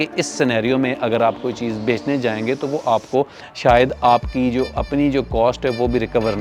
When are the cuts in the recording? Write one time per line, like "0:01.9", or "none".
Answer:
none